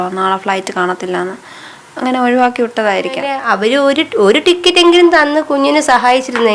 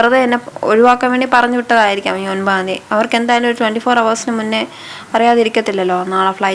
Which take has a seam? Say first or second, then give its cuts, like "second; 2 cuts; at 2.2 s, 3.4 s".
first; 1 cut; at 3.3 s